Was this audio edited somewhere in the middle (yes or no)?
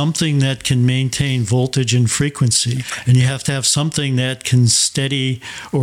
no